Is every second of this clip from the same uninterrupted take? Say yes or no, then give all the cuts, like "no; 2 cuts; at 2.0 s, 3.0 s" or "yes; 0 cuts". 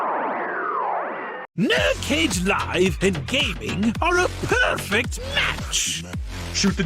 no; 1 cut; at 1.4 s